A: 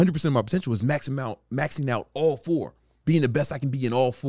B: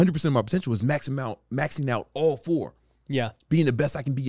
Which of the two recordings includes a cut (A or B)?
A